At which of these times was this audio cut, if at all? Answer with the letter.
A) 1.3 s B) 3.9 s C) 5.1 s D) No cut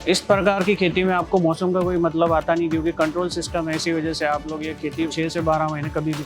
C